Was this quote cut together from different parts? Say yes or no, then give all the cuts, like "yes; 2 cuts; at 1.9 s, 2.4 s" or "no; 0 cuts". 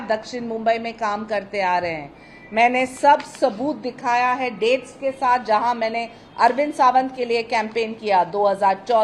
no; 0 cuts